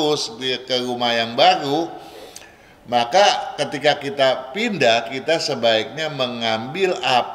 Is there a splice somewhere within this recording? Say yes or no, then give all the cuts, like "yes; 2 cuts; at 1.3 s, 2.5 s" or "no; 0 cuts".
no; 0 cuts